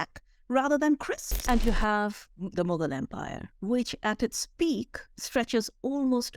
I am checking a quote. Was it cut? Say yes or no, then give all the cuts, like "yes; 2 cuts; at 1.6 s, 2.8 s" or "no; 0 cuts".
yes; 1 cut; at 1.3 s